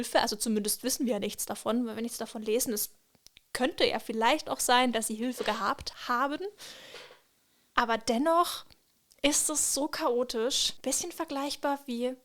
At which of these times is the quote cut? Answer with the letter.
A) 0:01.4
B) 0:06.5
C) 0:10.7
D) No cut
C